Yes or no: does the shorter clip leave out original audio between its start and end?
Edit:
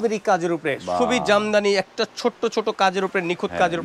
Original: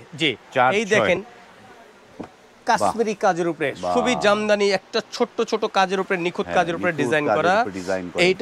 no